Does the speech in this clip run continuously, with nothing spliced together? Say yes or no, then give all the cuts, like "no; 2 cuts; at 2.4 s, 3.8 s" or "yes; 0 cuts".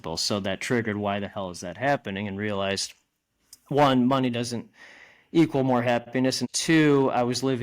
no; 1 cut; at 6.1 s